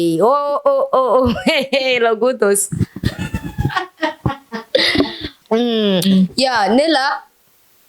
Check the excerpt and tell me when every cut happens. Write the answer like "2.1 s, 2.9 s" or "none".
5.3 s